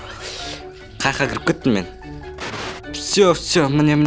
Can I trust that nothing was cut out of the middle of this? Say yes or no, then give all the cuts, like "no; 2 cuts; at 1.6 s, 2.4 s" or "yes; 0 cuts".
no; 1 cut; at 2.5 s